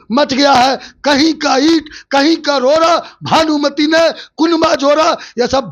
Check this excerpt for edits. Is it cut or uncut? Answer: uncut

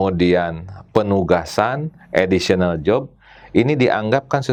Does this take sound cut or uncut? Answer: uncut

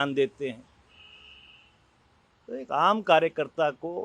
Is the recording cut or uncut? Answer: uncut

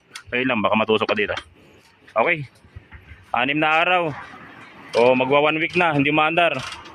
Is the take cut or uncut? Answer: uncut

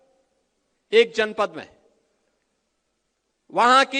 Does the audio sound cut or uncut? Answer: uncut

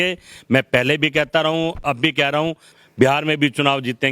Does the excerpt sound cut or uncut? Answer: cut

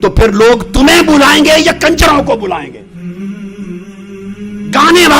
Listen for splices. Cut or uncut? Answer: uncut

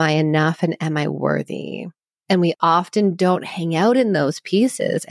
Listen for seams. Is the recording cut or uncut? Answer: uncut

